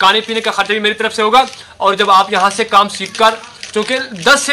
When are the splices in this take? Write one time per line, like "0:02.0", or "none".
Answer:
none